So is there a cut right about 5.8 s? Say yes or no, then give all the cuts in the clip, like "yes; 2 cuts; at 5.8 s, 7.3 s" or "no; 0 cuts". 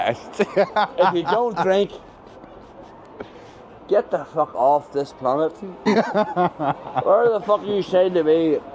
yes; 1 cut; at 5.8 s